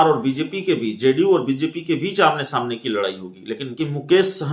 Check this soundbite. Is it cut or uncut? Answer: cut